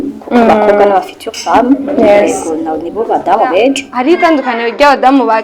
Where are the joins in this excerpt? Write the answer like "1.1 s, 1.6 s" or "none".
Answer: 3.9 s